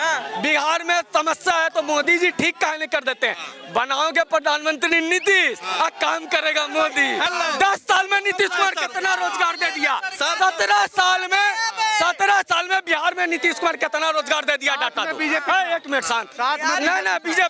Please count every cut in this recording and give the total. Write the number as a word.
one